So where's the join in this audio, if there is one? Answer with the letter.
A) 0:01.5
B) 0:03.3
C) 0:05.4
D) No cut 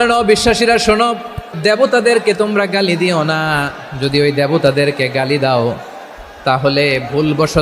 A